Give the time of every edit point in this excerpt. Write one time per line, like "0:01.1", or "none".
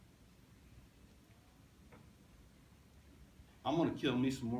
none